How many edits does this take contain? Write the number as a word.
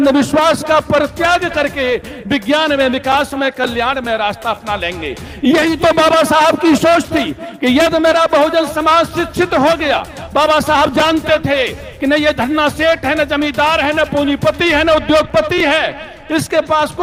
zero